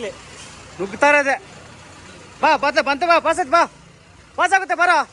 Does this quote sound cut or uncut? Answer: uncut